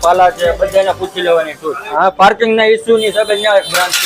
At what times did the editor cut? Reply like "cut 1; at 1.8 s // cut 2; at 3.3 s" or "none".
cut 1; at 1.9 s